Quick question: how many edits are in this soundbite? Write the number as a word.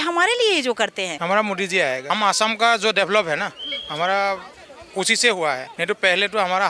three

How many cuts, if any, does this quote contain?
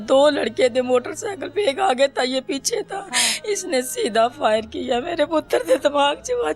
zero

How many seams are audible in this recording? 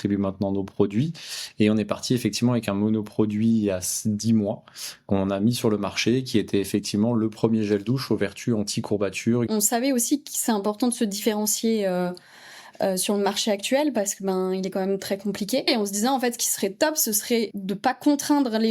three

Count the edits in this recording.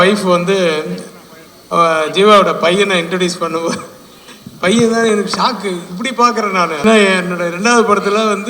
one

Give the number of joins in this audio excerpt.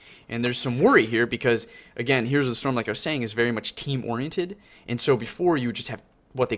one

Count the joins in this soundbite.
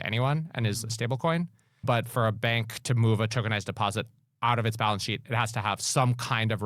one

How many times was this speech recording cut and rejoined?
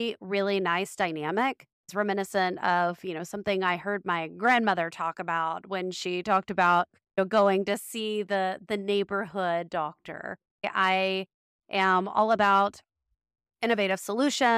two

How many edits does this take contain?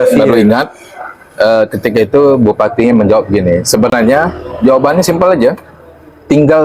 zero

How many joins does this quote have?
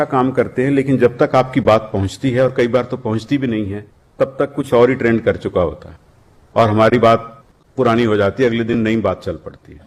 zero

